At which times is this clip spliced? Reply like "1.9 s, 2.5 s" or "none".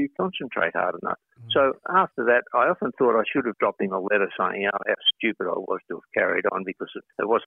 none